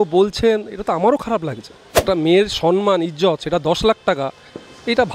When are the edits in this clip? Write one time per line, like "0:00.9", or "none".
0:02.0